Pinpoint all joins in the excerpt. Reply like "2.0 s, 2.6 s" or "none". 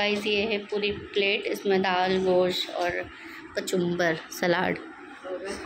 none